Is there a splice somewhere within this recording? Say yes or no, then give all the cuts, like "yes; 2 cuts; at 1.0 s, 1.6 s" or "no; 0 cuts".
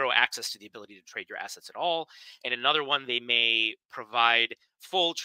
no; 0 cuts